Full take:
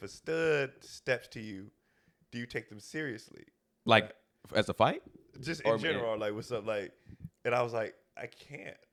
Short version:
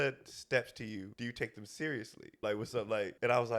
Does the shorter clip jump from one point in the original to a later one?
yes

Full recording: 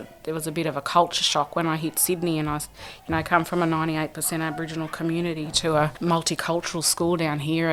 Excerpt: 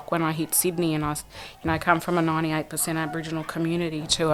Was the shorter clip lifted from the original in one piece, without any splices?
yes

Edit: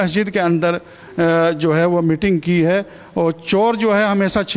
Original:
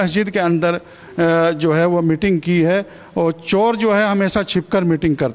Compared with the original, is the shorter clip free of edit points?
yes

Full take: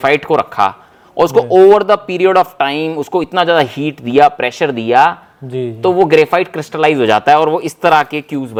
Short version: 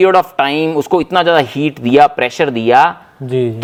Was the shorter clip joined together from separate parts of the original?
no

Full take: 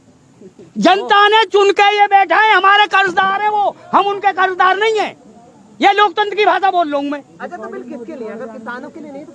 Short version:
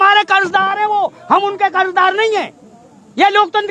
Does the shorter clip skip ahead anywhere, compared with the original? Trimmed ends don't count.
no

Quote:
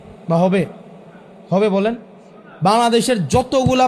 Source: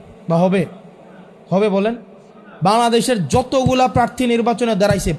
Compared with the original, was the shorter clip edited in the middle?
no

